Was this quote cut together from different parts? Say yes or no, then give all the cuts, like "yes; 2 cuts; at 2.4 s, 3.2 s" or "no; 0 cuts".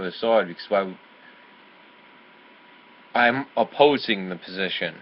yes; 1 cut; at 2.5 s